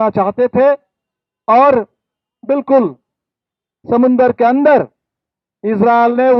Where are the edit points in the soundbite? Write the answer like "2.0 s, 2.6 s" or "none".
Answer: none